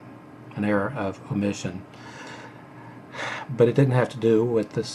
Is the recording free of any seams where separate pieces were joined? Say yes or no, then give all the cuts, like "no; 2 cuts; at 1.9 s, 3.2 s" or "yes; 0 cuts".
no; 1 cut; at 2.0 s